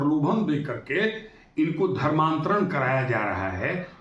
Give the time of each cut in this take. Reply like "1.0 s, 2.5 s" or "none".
none